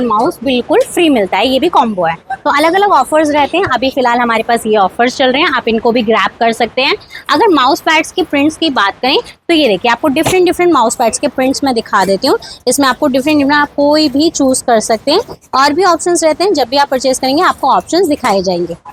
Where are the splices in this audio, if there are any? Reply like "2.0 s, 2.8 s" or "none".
none